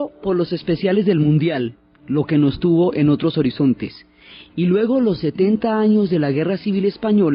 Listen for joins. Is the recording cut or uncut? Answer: cut